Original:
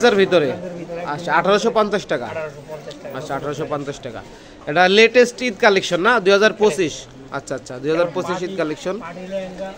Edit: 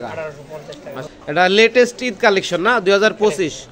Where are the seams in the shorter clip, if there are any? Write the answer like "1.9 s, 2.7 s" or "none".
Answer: 1.0 s